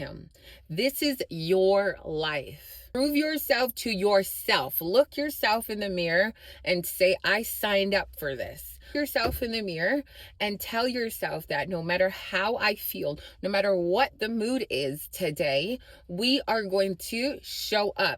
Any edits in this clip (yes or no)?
yes